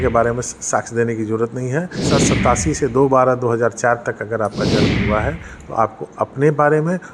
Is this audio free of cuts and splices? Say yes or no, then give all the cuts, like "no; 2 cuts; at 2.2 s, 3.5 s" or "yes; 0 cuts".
no; 1 cut; at 2.1 s